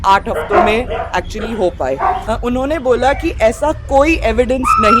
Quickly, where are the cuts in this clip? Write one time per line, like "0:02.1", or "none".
0:02.2

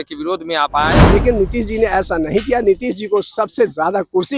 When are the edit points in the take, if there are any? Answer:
0:01.0

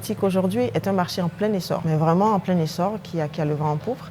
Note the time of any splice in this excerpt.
0:01.8

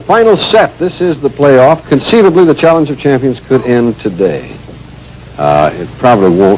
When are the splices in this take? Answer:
none

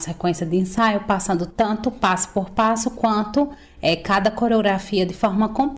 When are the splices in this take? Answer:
0:01.5

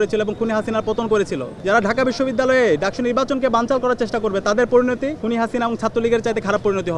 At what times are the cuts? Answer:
0:01.5
0:05.2

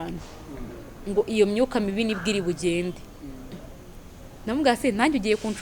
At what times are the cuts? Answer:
none

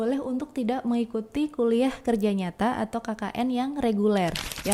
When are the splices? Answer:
none

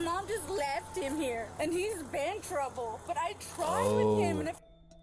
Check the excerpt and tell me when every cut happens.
0:01.5

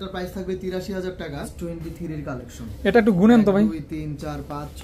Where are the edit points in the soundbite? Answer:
0:01.5

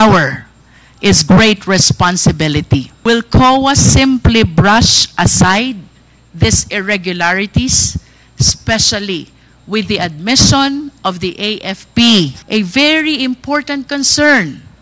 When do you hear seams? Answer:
0:02.9
0:12.4

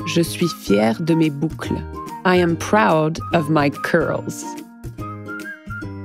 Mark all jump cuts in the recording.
0:04.3

